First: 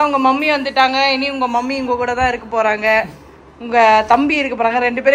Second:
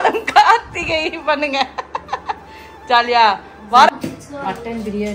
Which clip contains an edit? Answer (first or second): second